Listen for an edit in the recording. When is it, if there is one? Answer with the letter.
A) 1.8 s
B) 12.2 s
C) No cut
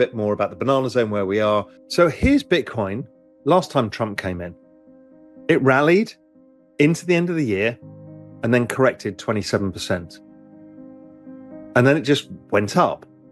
A